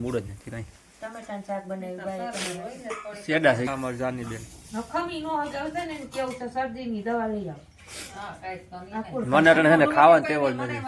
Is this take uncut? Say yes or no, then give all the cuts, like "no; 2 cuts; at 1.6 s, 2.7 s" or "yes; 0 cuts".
no; 1 cut; at 3.7 s